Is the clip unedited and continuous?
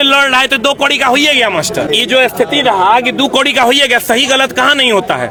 yes; 0 cuts

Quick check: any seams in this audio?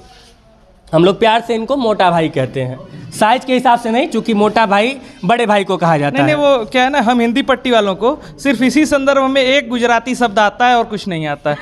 no; 0 cuts

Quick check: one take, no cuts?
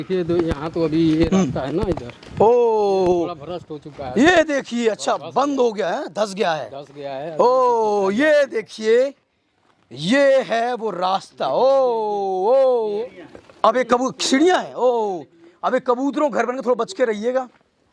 no; 1 cut; at 13.0 s

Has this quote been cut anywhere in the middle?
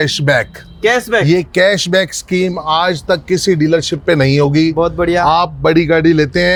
no; 0 cuts

